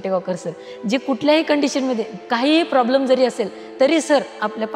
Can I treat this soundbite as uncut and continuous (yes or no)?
no